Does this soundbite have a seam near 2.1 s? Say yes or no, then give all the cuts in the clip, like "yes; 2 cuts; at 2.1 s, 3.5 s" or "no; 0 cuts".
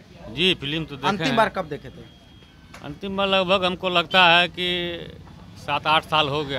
no; 0 cuts